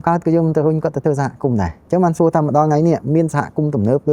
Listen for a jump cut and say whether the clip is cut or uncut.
cut